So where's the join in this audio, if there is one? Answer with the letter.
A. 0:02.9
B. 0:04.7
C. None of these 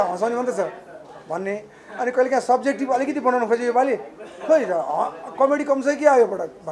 C